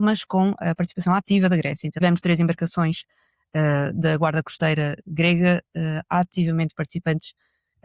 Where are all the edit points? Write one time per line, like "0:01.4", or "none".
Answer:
0:01.8